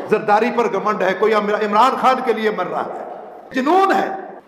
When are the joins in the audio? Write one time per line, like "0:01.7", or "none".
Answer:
0:03.5